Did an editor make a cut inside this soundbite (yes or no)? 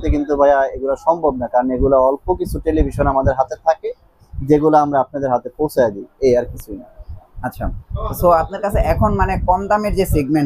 no